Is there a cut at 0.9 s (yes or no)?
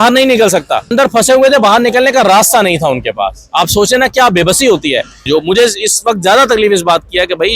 yes